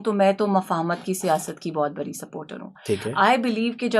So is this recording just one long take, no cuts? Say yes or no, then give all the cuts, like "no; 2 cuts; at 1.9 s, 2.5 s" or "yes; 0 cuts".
yes; 0 cuts